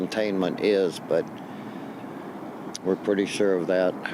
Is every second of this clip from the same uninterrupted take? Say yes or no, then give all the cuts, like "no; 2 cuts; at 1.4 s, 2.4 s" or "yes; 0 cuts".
yes; 0 cuts